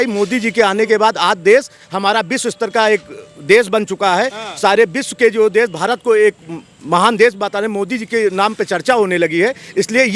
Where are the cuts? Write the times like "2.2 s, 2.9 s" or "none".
none